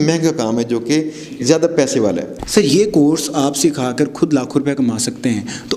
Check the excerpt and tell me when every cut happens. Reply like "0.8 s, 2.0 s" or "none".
2.3 s